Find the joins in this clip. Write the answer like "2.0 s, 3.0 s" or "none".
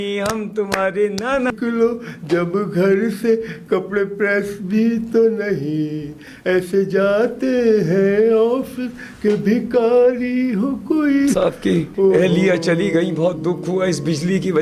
1.5 s, 11.3 s